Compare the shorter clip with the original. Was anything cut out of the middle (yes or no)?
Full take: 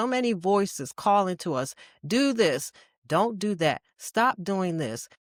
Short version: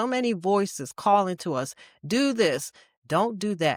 no